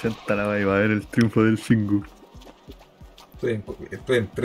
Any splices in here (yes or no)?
no